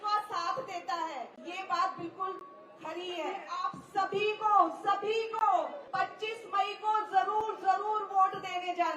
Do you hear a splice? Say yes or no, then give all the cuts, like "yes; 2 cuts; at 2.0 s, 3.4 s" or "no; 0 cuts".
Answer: yes; 3 cuts; at 1.4 s, 3.6 s, 5.8 s